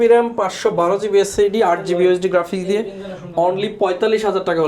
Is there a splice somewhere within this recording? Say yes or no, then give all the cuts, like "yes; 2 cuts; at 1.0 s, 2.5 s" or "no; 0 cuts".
no; 0 cuts